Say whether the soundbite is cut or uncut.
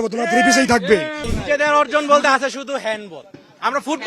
cut